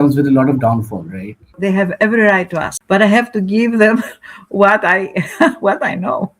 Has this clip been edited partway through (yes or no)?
yes